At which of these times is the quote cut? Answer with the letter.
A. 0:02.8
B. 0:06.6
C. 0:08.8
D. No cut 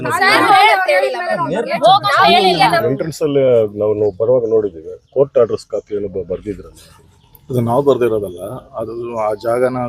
A